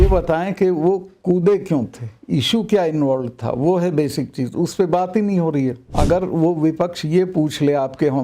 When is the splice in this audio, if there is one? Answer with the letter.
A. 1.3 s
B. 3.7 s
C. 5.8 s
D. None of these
C